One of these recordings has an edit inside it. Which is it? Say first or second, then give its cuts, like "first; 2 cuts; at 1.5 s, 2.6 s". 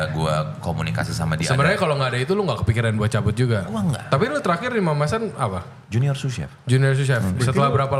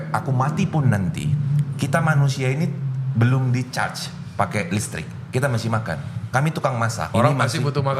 second; 1 cut; at 7.0 s